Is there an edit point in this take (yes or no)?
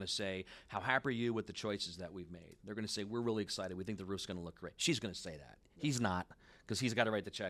no